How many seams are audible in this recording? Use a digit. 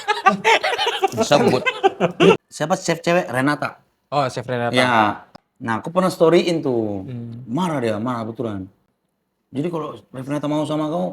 2